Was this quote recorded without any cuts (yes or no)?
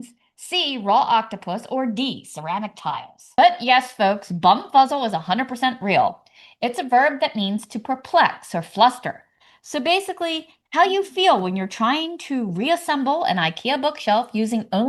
no